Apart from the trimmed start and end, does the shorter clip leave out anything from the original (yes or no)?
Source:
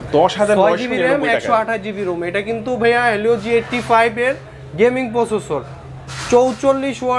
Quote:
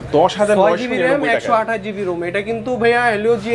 no